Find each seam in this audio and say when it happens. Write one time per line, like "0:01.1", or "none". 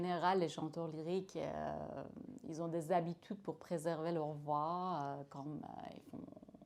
none